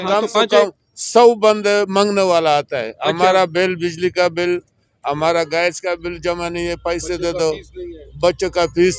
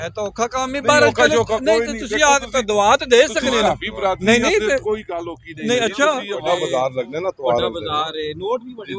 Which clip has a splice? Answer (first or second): second